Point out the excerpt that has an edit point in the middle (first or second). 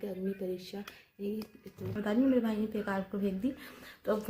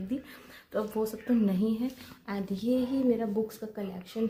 first